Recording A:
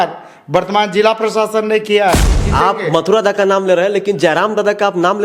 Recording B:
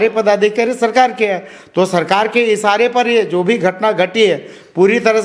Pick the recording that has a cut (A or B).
A